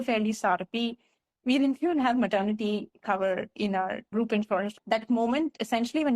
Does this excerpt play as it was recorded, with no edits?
no; 1 cut; at 4.7 s

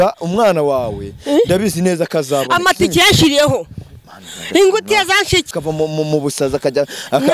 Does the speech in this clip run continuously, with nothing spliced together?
no; 1 cut; at 5.5 s

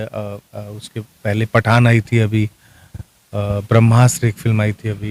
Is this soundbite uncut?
yes; 0 cuts

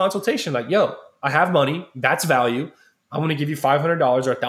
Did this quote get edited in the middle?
no; 0 cuts

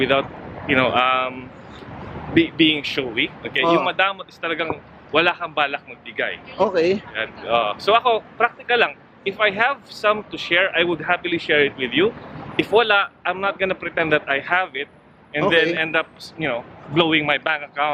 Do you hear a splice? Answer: no; 0 cuts

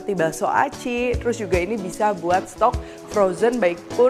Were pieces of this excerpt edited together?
no; 0 cuts

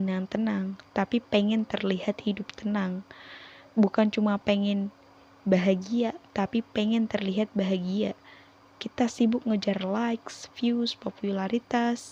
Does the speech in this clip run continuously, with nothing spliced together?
yes; 0 cuts

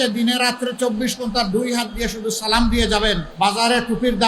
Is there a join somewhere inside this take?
yes; 1 cut; at 3.3 s

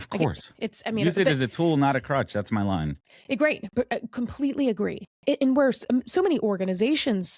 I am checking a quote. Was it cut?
no; 0 cuts

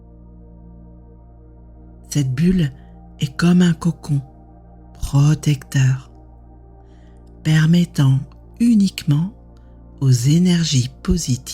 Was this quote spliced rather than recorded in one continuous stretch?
yes; 3 cuts; at 2.1 s, 6.0 s, 7.4 s

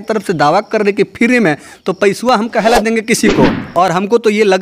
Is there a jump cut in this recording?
yes; 1 cut; at 3.6 s

